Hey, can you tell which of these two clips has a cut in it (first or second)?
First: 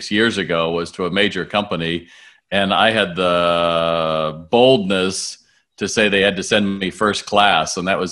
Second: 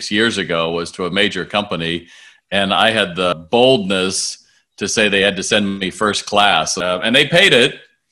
second